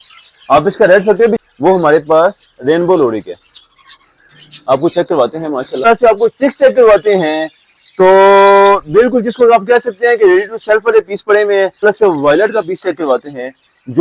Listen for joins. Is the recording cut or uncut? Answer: cut